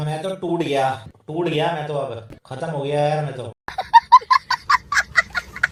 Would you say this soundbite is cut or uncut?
uncut